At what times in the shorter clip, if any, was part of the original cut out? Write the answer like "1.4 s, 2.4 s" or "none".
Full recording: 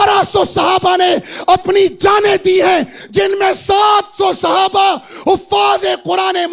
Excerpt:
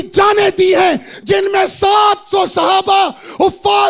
none